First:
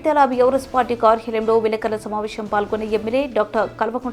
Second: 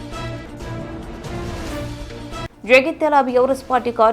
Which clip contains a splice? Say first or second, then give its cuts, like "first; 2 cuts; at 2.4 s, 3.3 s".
second; 1 cut; at 1.9 s